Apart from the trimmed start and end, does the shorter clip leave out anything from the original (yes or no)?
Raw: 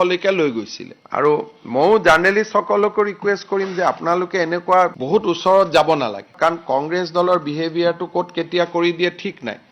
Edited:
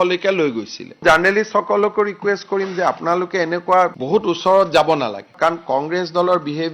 yes